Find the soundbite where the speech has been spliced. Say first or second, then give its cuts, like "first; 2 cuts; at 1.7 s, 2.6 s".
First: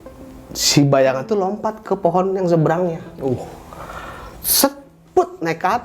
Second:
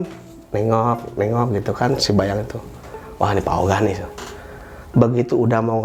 first; 1 cut; at 3.0 s